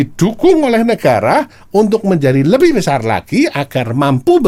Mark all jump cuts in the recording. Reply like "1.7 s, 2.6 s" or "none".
none